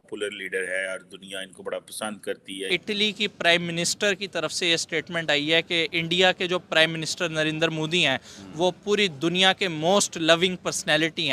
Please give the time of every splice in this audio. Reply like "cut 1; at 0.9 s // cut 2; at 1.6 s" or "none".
cut 1; at 2.8 s